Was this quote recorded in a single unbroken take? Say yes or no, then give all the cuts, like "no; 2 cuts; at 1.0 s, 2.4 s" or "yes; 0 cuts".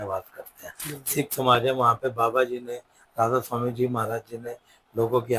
yes; 0 cuts